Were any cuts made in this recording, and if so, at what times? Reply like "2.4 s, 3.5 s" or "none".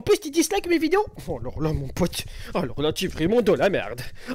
none